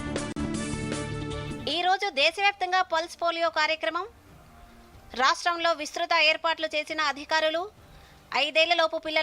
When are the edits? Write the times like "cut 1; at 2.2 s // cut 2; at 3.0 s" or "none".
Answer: cut 1; at 1.1 s